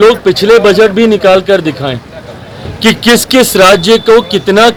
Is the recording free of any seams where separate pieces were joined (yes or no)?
yes